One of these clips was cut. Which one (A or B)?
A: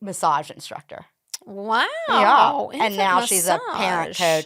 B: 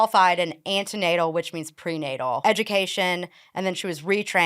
B